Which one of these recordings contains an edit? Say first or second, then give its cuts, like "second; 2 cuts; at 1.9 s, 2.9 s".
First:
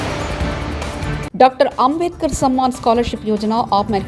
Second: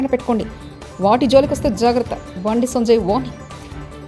first; 1 cut; at 1.2 s